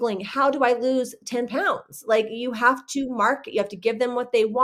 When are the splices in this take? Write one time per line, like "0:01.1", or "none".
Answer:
none